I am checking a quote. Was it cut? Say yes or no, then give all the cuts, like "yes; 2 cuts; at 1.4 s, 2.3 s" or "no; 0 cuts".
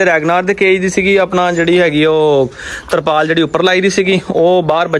no; 0 cuts